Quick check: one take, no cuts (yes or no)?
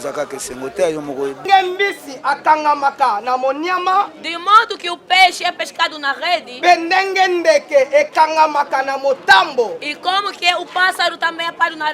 no